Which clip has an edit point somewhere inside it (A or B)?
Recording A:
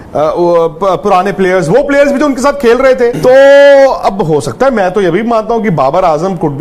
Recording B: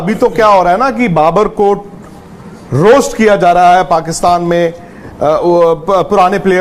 A